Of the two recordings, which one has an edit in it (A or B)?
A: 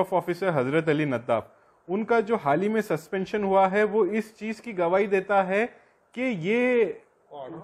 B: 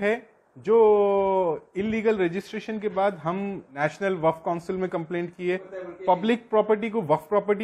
B